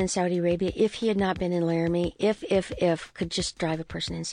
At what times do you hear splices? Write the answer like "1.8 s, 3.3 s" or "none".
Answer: none